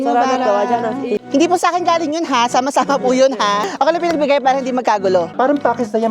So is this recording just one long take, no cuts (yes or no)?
no